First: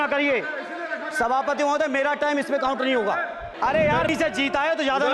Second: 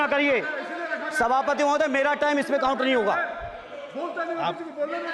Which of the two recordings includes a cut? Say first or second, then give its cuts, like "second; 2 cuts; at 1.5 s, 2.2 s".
first; 1 cut; at 3.5 s